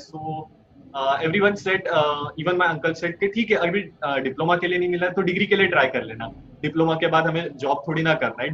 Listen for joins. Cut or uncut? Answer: uncut